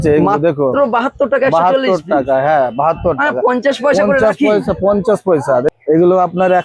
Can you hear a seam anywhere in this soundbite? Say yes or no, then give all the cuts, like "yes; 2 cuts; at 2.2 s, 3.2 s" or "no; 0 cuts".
yes; 1 cut; at 5.7 s